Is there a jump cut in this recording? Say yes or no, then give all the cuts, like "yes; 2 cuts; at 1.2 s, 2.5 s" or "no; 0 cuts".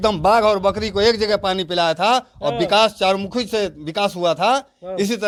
no; 0 cuts